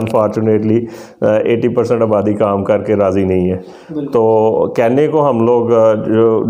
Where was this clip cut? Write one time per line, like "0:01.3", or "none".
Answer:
none